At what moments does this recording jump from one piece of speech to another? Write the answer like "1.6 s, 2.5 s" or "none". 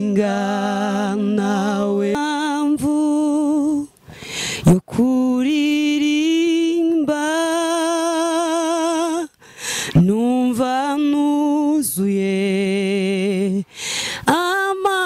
2.1 s